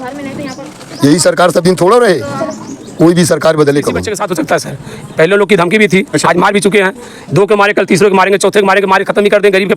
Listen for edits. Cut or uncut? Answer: cut